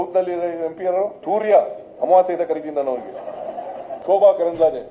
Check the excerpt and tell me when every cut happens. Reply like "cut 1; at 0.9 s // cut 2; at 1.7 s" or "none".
cut 1; at 1.2 s // cut 2; at 3.9 s